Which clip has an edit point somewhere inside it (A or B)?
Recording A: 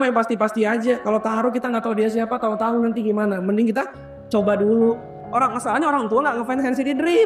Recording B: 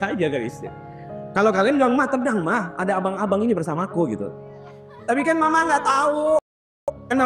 A